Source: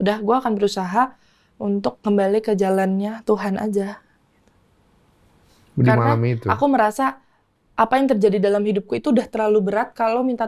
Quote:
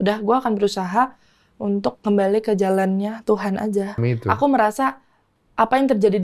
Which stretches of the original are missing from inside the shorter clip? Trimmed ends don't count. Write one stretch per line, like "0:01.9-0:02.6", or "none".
0:04.0-0:06.2